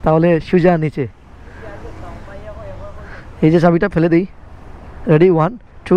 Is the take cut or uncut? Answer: uncut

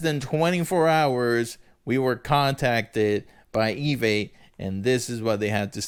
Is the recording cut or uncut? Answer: uncut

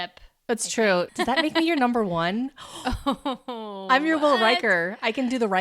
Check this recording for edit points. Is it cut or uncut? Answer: cut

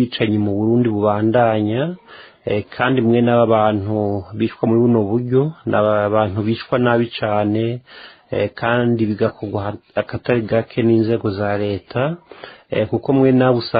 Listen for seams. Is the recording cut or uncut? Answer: uncut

